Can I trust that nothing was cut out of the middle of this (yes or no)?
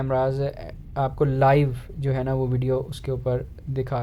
yes